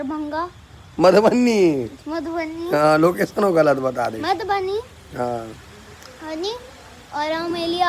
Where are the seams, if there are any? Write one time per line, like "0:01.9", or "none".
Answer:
none